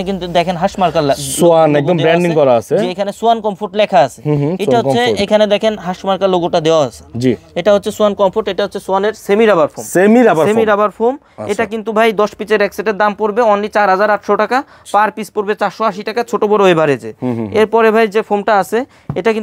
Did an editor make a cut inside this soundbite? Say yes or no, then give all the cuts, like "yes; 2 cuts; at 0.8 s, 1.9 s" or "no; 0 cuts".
no; 0 cuts